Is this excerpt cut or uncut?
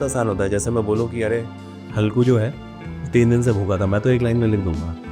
uncut